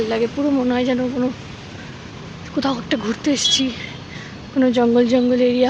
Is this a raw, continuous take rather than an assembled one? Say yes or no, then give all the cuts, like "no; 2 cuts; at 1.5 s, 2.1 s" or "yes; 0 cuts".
yes; 0 cuts